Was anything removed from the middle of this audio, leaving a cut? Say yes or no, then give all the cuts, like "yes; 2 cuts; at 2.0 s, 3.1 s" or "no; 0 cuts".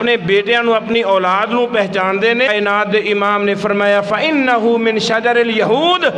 yes; 1 cut; at 2.5 s